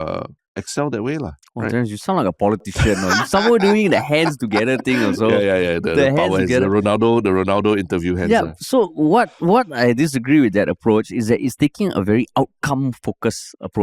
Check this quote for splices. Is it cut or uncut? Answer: uncut